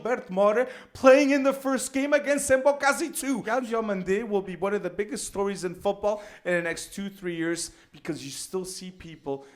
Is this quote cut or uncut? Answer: cut